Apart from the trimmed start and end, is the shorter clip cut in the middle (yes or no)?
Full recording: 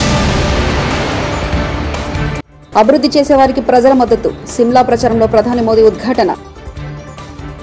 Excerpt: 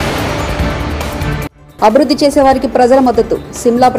no